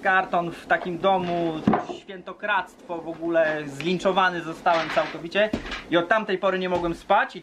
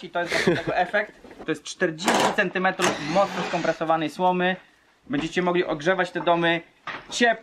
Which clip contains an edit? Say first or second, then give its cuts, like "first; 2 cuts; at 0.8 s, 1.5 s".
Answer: second; 2 cuts; at 1.4 s, 4.9 s